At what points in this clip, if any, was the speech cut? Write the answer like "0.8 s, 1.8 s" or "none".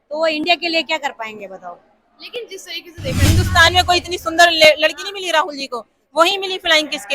3.2 s